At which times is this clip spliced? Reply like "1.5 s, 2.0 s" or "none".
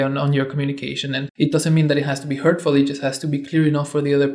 1.2 s